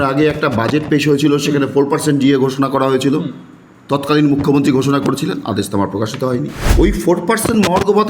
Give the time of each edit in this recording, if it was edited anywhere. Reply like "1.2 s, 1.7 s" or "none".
6.6 s